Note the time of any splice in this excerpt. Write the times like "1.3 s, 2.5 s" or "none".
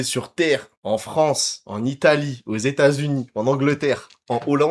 none